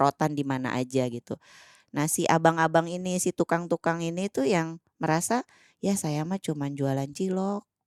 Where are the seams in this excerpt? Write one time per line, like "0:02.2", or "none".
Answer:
none